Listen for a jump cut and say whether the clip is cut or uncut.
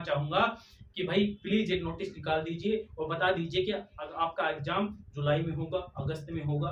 uncut